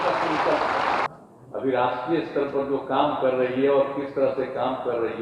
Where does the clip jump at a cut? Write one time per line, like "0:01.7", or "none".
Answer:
0:01.1